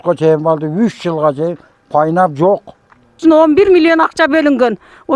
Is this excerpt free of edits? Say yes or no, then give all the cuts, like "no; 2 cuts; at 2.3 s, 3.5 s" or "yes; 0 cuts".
no; 1 cut; at 3.2 s